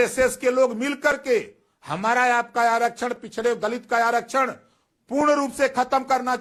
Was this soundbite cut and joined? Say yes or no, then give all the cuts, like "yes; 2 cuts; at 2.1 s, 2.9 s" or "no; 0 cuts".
no; 0 cuts